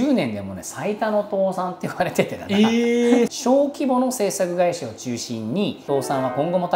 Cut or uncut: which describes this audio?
cut